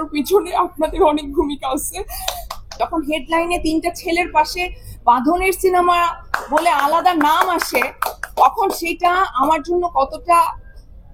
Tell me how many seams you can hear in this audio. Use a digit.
1